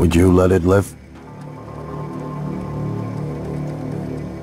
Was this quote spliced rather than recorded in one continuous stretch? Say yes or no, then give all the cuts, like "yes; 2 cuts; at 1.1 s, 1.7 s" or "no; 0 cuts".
yes; 1 cut; at 1.1 s